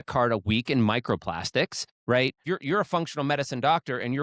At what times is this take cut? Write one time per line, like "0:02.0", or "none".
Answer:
0:02.4